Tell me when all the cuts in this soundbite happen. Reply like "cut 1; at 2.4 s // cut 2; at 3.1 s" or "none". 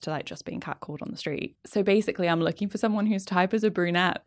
cut 1; at 1.6 s